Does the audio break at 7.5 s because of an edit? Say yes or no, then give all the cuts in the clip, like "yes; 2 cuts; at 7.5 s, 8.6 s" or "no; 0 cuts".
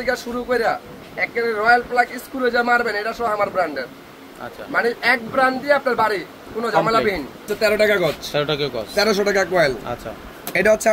yes; 1 cut; at 7.5 s